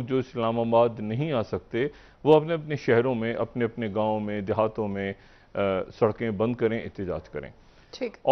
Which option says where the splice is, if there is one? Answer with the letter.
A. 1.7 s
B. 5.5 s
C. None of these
C